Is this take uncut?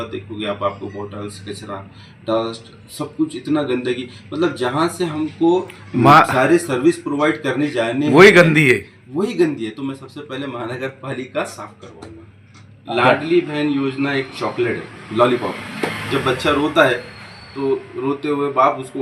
no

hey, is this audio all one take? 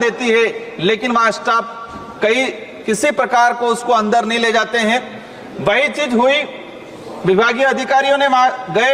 yes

